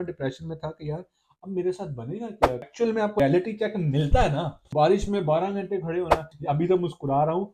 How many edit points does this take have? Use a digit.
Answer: 2